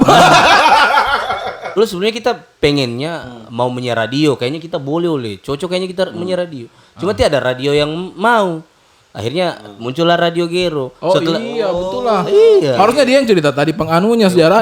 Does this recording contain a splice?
yes; 1 cut; at 1.7 s

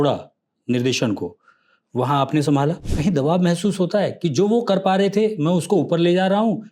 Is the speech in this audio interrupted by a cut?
yes; 1 cut; at 2.9 s

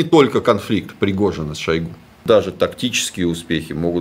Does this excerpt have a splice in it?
yes; 1 cut; at 2.1 s

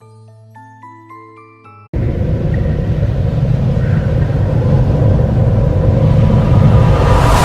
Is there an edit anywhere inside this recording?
no; 0 cuts

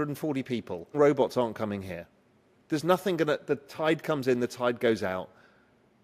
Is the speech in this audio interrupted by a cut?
yes; 1 cut; at 0.9 s

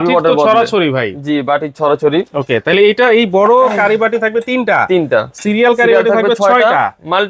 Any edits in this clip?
no; 0 cuts

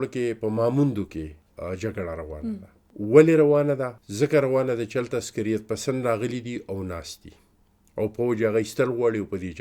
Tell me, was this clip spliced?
yes; 3 cuts; at 1.4 s, 2.8 s, 4.0 s

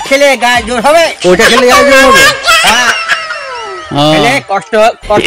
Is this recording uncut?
yes; 0 cuts

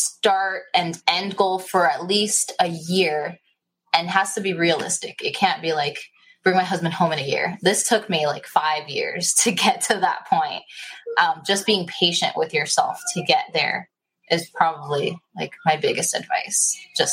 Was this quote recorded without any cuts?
no; 1 cut; at 0.9 s

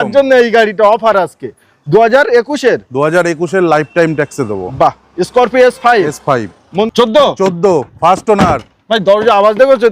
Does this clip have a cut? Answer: yes; 1 cut; at 6.9 s

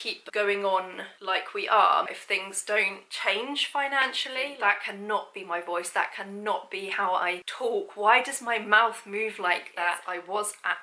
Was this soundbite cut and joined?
yes; 3 cuts; at 2.1 s, 4.5 s, 10.0 s

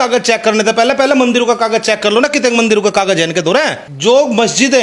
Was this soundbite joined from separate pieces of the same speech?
yes; 1 cut; at 3.8 s

